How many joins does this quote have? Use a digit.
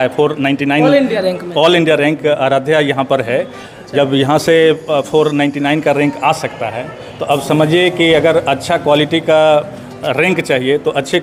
0